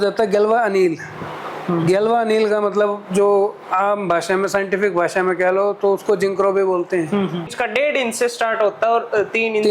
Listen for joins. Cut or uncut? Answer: cut